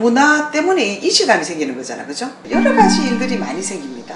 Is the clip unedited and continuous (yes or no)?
no